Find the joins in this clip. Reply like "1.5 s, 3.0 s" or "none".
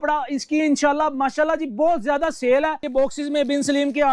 2.8 s